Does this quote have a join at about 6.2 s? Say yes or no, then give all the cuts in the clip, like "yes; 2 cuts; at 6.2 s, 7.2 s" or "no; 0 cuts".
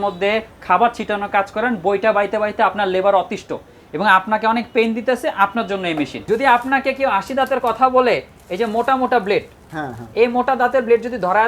yes; 1 cut; at 6.2 s